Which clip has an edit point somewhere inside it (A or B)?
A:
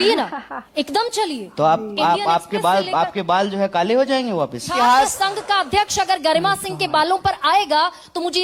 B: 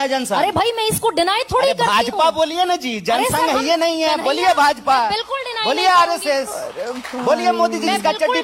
A